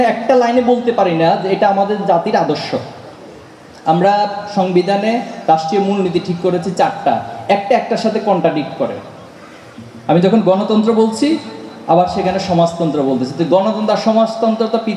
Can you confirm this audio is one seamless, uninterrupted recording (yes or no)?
yes